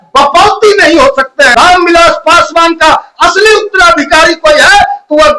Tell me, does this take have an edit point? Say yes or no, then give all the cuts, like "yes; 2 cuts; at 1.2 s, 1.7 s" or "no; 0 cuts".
yes; 1 cut; at 1.5 s